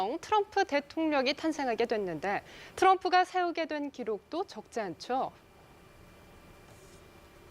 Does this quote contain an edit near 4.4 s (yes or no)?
yes